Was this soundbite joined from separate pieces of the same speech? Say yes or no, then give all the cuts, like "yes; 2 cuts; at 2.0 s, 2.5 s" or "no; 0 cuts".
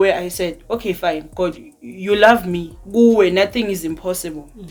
no; 0 cuts